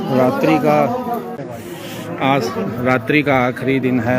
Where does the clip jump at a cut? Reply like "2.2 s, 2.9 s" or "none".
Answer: 1.3 s